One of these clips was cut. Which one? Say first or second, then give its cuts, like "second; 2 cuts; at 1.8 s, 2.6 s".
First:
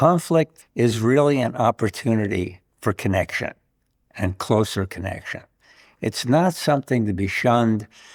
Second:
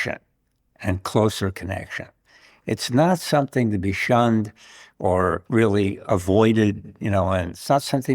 second; 1 cut; at 5.8 s